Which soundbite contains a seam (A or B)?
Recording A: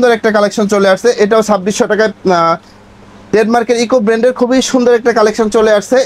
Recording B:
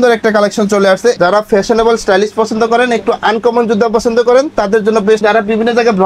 B